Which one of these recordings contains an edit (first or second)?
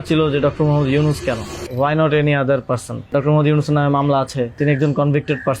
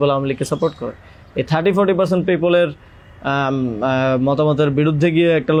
first